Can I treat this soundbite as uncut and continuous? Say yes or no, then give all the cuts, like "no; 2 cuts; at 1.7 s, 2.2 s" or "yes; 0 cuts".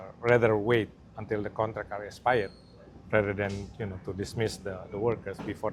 yes; 0 cuts